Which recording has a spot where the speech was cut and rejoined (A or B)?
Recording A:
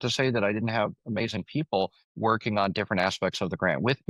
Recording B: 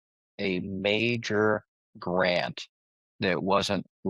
A